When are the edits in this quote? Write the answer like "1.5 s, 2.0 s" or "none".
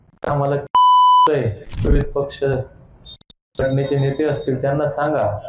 1.7 s